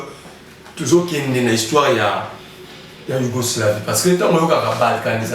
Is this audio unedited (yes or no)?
yes